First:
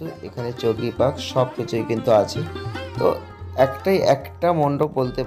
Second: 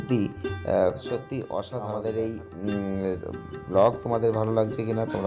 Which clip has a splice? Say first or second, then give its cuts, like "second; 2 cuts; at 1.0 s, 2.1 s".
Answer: second; 1 cut; at 1.7 s